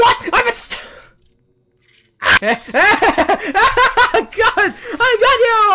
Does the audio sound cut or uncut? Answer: cut